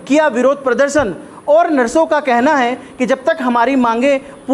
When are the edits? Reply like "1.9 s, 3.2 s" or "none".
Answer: none